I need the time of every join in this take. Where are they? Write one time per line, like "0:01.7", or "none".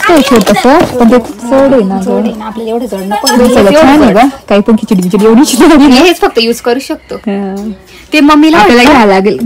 none